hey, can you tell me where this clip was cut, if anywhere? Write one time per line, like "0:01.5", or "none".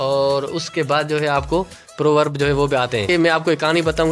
0:03.0